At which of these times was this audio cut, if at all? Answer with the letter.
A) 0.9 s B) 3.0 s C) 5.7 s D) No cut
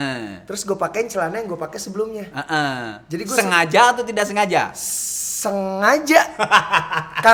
D